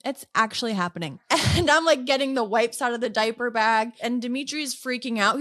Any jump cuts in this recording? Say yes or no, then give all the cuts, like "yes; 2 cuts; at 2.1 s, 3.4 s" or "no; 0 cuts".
yes; 2 cuts; at 1.2 s, 4.0 s